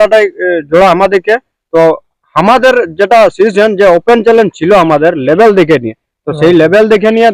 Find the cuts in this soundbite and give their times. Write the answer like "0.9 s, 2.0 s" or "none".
none